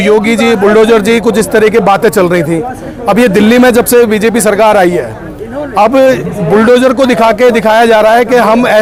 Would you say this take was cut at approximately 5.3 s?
no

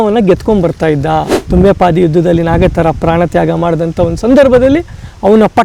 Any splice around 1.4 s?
yes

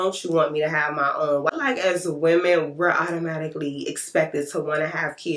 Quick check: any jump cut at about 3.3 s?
no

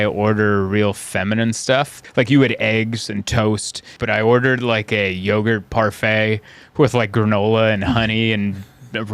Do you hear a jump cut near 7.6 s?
no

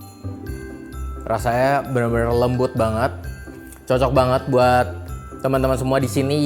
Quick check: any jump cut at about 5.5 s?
no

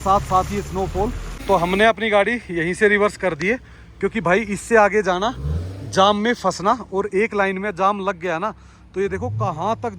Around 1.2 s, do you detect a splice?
yes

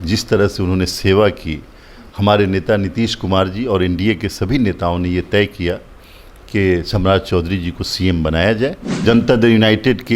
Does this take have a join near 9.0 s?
yes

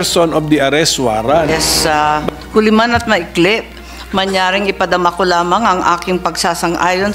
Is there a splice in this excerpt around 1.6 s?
yes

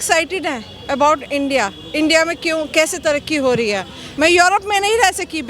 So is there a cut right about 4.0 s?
yes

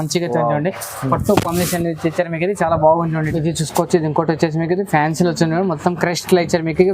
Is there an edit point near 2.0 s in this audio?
no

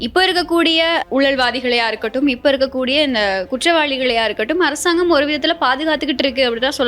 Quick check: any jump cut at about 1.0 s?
yes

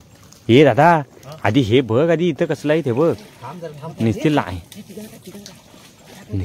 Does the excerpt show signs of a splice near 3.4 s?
no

